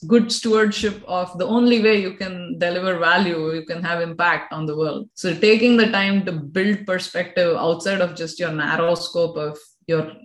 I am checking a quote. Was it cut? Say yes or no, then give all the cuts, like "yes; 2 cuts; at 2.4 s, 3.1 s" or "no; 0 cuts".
yes; 1 cut; at 5.1 s